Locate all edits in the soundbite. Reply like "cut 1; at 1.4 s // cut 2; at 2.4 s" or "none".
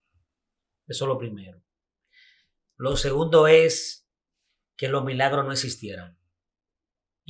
none